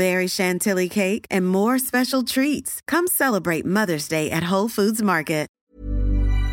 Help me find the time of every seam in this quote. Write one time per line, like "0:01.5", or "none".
0:05.5